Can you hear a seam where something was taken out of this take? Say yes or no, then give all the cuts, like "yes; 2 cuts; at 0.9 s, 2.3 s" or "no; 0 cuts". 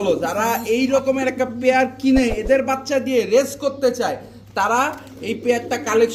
no; 0 cuts